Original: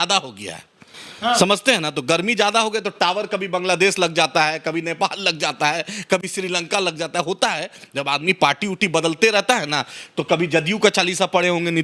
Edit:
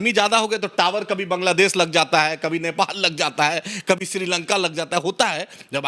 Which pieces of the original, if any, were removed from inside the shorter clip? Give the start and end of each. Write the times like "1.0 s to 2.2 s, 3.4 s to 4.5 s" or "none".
none